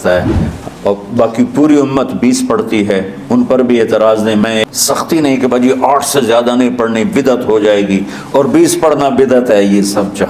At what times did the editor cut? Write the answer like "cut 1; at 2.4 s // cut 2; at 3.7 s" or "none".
cut 1; at 4.7 s